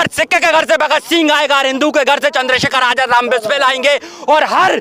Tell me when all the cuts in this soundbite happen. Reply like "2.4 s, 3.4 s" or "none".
none